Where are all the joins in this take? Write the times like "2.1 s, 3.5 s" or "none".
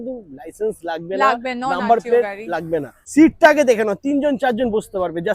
3.0 s